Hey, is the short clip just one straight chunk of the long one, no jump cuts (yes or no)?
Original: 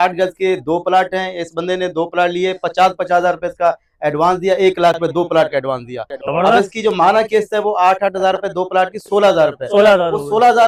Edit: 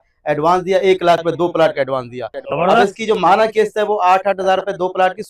yes